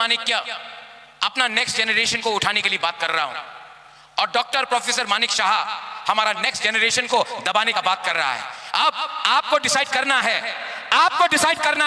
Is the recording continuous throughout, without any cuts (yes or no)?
yes